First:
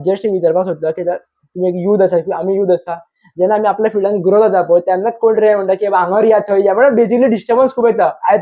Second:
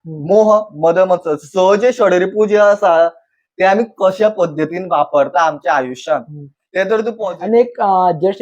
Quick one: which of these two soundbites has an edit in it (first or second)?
second